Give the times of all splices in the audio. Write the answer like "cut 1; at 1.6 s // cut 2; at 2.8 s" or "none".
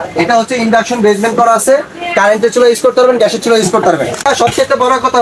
cut 1; at 4.3 s